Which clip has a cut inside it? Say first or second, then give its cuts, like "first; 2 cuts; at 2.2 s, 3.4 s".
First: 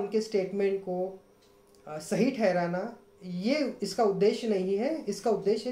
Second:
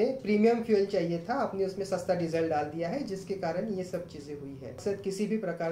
second; 1 cut; at 4.8 s